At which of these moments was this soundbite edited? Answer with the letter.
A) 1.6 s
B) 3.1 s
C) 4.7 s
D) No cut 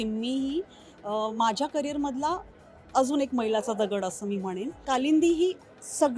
C